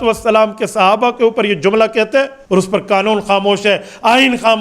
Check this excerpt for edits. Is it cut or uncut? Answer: cut